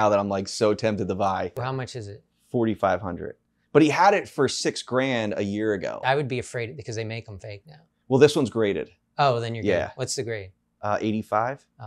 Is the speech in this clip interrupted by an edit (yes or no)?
yes